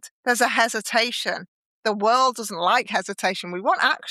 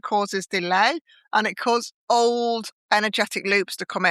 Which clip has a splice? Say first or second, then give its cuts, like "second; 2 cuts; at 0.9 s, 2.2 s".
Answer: second; 2 cuts; at 1.9 s, 2.7 s